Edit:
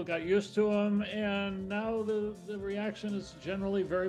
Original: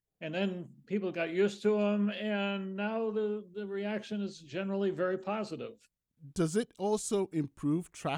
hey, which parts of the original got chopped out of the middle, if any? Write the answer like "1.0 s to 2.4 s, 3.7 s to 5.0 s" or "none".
none